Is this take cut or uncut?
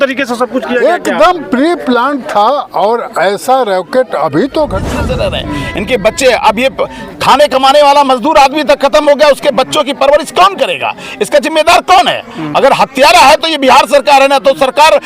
cut